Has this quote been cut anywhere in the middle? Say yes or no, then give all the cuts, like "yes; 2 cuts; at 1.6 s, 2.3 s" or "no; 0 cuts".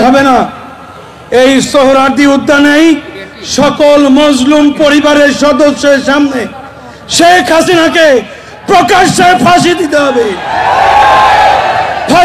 no; 0 cuts